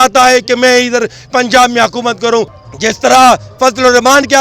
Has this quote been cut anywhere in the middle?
yes; 1 cut; at 2.6 s

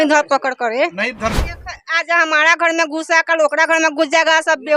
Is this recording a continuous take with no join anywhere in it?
no; 1 cut; at 1.4 s

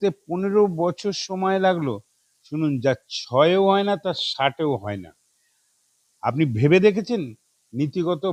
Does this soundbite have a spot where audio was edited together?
no; 0 cuts

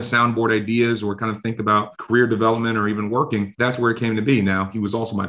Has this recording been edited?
yes; 2 cuts; at 1.9 s, 3.5 s

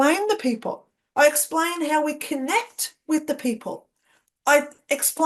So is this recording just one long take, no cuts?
yes; 0 cuts

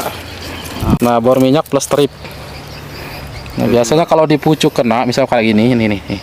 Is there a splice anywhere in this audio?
yes; 1 cut; at 1.0 s

